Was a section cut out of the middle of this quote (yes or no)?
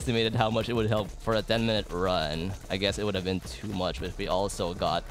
yes